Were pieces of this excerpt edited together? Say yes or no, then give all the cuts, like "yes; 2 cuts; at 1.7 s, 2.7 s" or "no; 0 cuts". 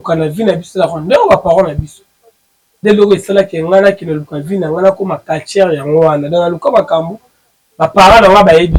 no; 0 cuts